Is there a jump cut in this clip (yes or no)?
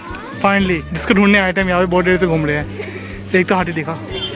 no